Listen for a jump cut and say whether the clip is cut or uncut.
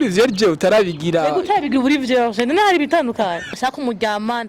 cut